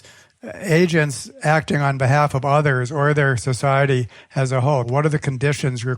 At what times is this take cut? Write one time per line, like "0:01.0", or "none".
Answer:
0:04.9